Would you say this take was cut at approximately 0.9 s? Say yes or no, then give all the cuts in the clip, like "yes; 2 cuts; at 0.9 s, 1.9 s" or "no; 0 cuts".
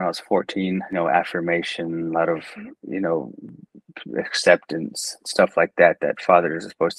yes; 1 cut; at 0.9 s